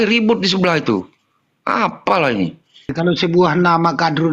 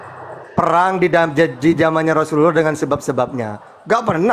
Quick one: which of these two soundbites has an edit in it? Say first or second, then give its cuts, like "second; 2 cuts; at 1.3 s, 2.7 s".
first; 1 cut; at 2.9 s